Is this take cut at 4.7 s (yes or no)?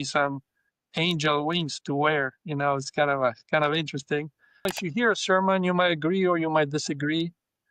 yes